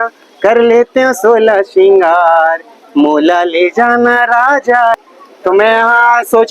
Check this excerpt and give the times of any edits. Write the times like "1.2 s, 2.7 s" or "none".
5.0 s

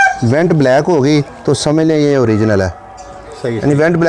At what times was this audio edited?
none

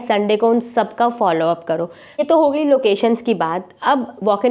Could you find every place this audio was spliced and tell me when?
2.2 s

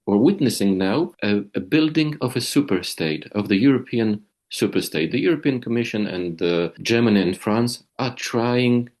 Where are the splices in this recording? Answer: 1.2 s, 6.8 s

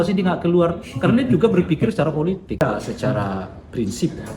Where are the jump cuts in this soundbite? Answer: 2.6 s

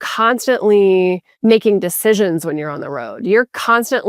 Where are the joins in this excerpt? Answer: 1.3 s

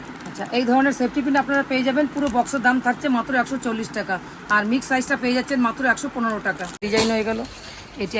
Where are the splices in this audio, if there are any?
6.8 s

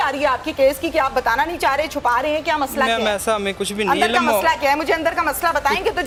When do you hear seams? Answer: none

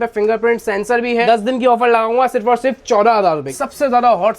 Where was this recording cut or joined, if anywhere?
1.2 s, 3.5 s

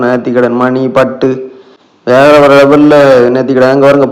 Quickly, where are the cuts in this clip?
none

